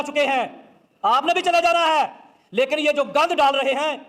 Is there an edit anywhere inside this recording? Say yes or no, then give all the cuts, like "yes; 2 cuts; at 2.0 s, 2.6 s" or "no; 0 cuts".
no; 0 cuts